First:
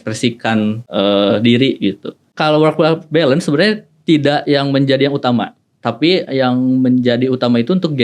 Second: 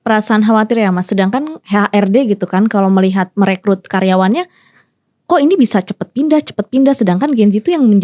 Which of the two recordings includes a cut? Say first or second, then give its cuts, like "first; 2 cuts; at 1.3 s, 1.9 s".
first; 2 cuts; at 0.8 s, 2.3 s